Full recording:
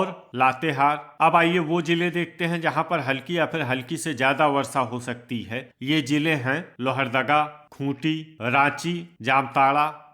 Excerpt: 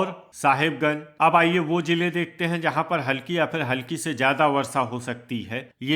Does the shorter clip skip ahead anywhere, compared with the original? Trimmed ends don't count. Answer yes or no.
no